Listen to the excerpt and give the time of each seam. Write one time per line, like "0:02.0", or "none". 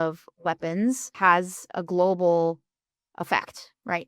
0:01.1